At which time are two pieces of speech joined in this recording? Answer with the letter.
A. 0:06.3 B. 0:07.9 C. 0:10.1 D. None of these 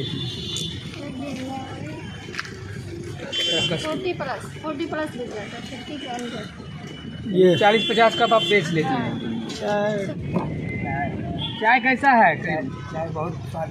C